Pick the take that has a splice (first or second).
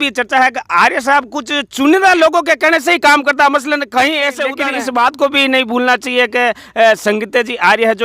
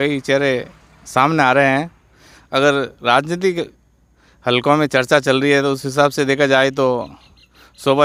first